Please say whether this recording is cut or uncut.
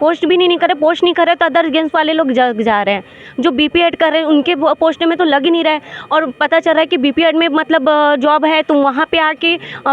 uncut